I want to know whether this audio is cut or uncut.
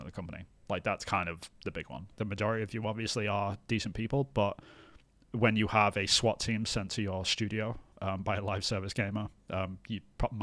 cut